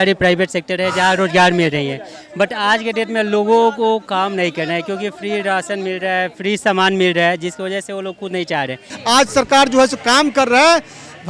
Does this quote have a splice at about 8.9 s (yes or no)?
yes